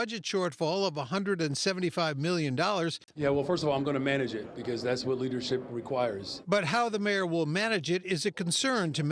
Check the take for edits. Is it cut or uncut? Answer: cut